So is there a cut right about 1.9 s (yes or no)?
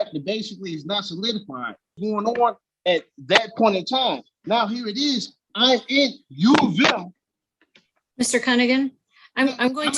yes